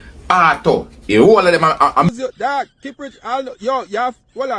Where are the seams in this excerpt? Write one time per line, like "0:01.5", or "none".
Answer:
0:02.1